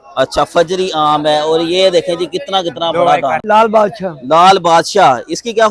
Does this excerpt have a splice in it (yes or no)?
yes